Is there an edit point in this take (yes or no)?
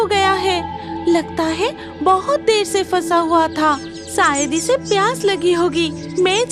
no